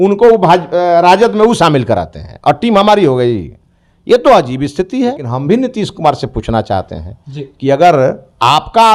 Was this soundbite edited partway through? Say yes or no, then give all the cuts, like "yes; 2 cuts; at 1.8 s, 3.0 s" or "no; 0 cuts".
yes; 1 cut; at 5.3 s